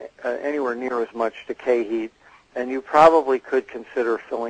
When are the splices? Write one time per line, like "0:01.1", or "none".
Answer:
0:01.1